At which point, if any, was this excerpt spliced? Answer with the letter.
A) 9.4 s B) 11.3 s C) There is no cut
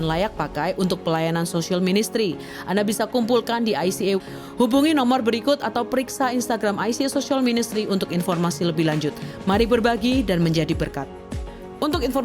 B